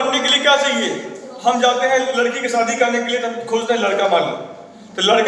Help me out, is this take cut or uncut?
uncut